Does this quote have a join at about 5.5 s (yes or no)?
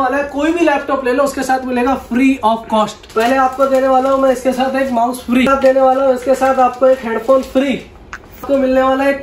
yes